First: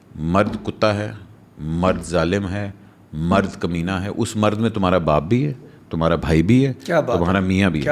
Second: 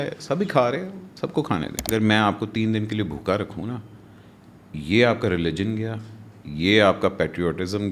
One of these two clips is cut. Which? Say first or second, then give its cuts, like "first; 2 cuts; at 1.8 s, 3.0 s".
second; 1 cut; at 1.8 s